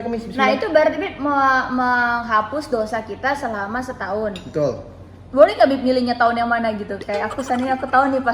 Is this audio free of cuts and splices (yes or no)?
yes